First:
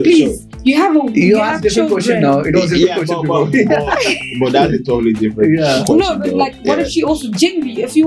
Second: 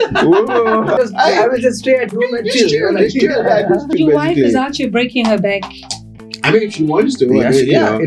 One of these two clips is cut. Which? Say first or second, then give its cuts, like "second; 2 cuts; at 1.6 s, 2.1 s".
second; 2 cuts; at 0.9 s, 3.9 s